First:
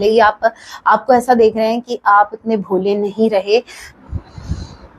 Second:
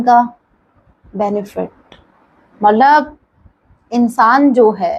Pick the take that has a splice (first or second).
first